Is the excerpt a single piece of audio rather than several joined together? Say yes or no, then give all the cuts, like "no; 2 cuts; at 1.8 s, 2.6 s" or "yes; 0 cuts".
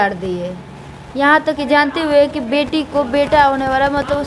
yes; 0 cuts